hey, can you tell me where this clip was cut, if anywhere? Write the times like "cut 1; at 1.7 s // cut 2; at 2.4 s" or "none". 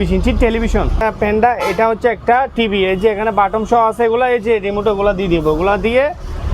cut 1; at 1.0 s